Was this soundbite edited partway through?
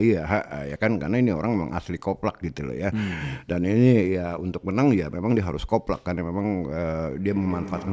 no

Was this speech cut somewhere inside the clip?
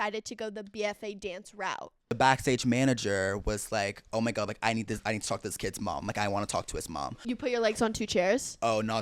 yes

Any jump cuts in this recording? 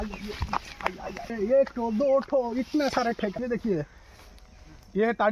yes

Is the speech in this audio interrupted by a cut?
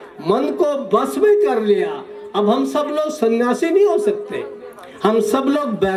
no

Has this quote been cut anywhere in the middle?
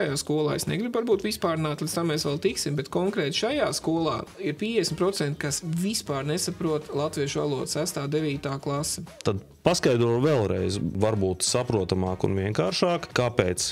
yes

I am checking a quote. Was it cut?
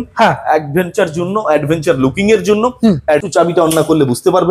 yes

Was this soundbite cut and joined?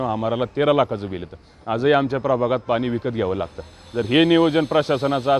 no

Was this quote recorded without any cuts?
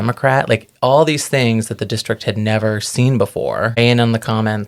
no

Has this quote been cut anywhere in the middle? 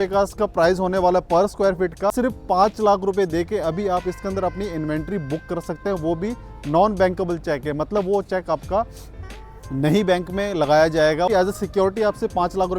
yes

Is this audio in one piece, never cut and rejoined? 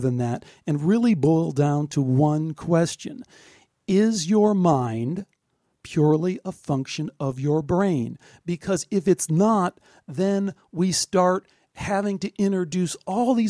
yes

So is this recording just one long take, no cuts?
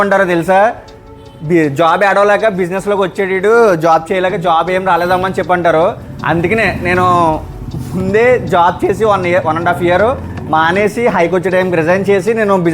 yes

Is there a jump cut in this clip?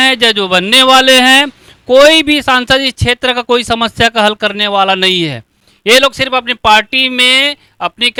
no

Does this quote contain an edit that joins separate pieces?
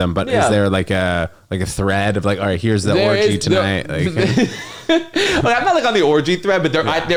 no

